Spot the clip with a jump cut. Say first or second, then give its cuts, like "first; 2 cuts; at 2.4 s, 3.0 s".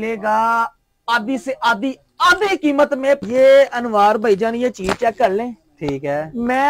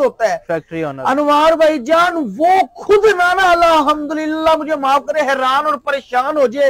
first; 1 cut; at 3.2 s